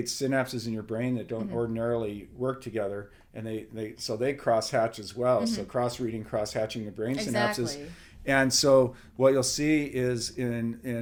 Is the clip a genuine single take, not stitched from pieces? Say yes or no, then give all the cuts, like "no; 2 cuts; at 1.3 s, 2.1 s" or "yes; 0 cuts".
yes; 0 cuts